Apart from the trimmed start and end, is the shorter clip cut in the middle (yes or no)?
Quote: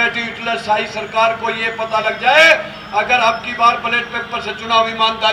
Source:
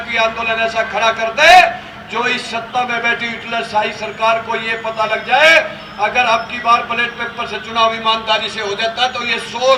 no